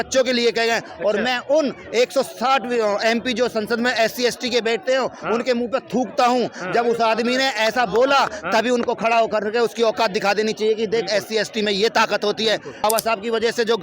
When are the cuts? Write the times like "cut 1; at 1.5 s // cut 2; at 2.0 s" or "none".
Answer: cut 1; at 12.8 s